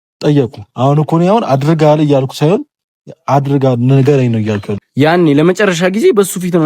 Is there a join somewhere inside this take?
yes; 1 cut; at 4.7 s

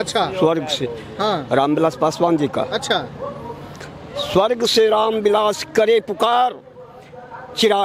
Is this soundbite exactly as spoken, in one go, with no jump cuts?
yes; 0 cuts

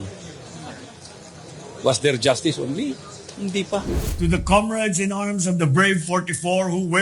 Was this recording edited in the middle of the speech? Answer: yes; 1 cut; at 4.0 s

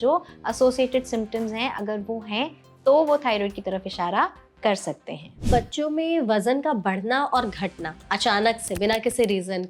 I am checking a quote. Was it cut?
yes; 1 cut; at 5.5 s

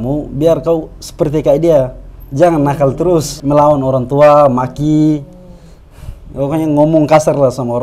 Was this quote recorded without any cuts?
no; 1 cut; at 3.3 s

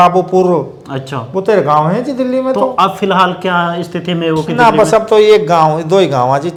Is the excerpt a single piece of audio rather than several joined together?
yes; 0 cuts

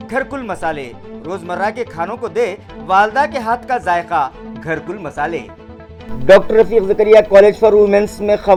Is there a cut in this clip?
no; 0 cuts

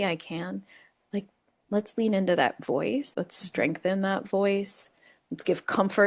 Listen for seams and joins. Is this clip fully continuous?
no; 1 cut; at 3.1 s

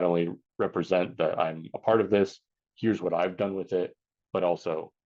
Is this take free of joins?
yes; 0 cuts

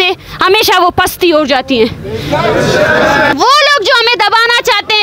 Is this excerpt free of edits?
no; 1 cut; at 3.3 s

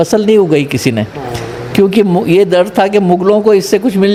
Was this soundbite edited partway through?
no; 0 cuts

